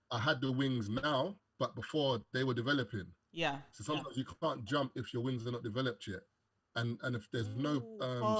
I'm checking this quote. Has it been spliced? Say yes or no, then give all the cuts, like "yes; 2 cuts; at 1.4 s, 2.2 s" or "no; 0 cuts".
yes; 1 cut; at 1.4 s